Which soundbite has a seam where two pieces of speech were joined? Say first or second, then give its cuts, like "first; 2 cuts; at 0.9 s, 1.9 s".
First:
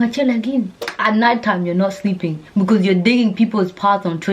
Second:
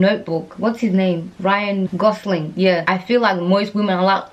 first; 1 cut; at 0.9 s